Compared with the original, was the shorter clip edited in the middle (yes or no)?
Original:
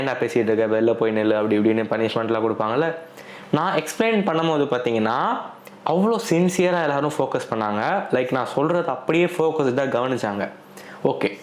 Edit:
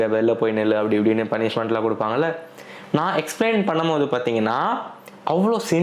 no